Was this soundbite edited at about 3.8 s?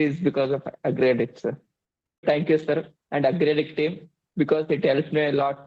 no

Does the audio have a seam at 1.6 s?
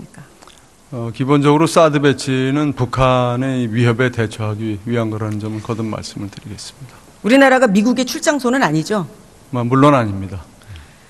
yes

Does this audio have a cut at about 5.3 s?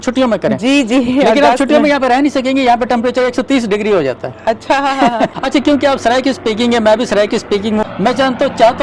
yes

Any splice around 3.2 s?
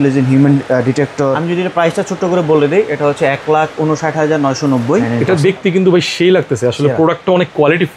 no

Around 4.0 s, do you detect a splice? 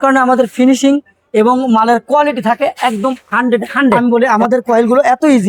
yes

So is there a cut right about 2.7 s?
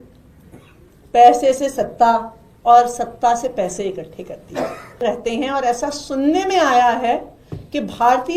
no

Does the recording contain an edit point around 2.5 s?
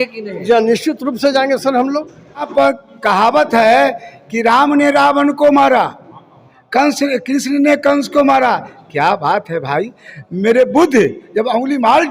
yes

